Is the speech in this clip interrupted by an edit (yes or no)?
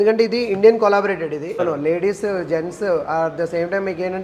yes